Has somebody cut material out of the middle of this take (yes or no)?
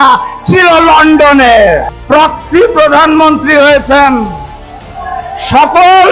yes